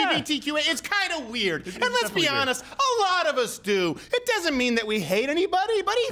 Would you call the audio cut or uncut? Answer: uncut